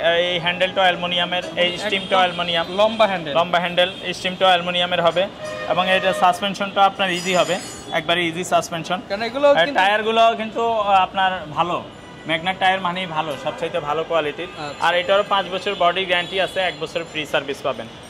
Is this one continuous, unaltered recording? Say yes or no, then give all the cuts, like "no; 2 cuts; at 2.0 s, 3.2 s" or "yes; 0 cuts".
yes; 0 cuts